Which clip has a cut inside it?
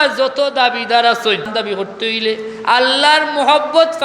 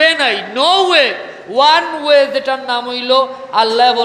first; 1 cut; at 1.5 s

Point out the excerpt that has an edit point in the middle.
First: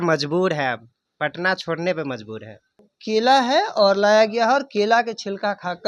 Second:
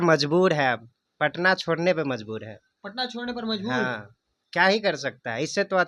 first; 1 cut; at 2.9 s

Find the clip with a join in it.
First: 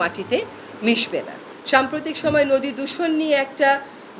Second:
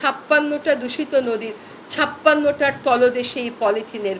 first; 1 cut; at 1.5 s

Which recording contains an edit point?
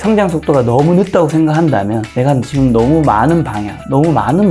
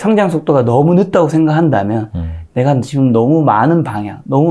first; 1 cut; at 2.0 s

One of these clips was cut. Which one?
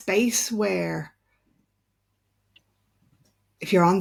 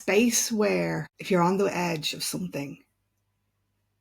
second; 1 cut; at 1.1 s

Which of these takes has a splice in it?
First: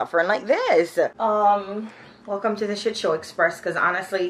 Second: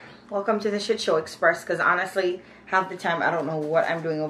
first; 1 cut; at 0.9 s

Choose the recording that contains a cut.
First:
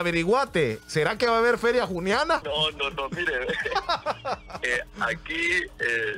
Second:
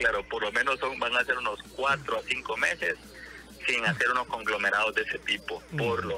first; 1 cut; at 2.4 s

